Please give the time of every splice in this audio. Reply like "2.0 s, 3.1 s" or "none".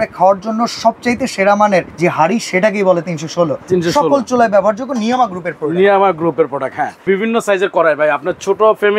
1.9 s, 7.0 s